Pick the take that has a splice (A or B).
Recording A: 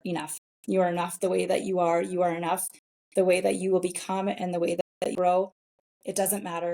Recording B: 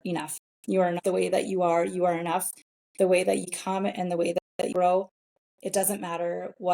B